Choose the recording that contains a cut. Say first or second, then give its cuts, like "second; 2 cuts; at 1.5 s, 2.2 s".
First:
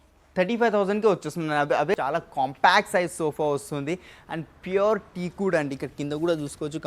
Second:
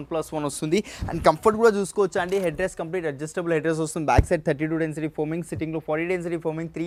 first; 1 cut; at 1.9 s